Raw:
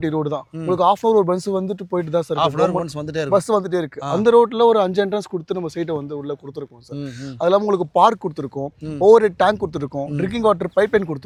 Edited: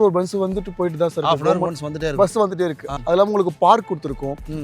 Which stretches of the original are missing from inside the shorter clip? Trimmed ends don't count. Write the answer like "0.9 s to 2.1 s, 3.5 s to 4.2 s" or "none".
4.0 s to 7.2 s